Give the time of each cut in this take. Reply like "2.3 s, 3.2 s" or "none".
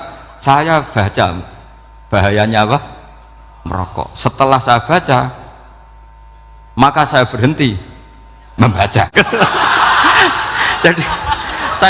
9.1 s

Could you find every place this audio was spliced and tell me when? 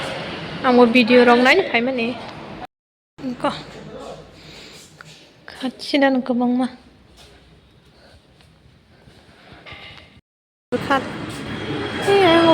2.7 s, 10.2 s

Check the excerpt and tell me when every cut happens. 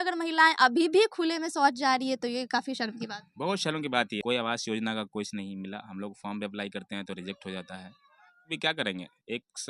4.2 s, 8.5 s

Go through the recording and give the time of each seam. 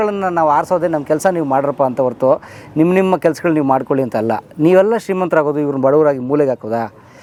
none

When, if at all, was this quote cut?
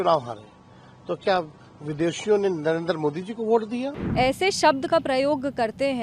4.0 s

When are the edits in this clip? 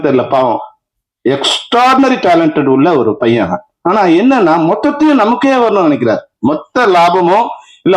none

